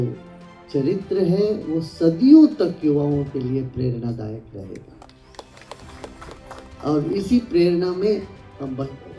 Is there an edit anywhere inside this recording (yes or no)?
no